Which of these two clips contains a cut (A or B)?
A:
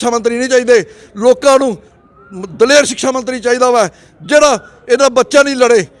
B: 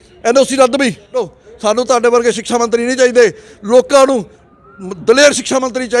B